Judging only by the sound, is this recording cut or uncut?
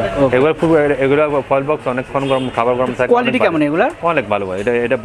uncut